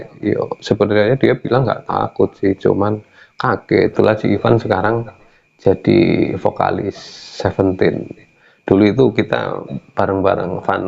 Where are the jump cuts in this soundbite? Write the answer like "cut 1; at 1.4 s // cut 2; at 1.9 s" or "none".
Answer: cut 1; at 3.9 s